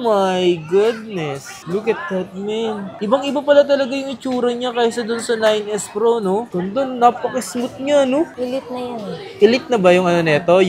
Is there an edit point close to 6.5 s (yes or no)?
yes